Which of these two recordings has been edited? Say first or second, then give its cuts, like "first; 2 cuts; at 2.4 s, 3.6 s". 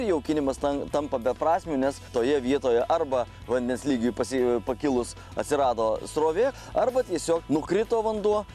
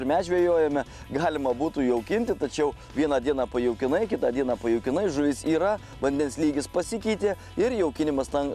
first; 3 cuts; at 2.1 s, 6.6 s, 7.4 s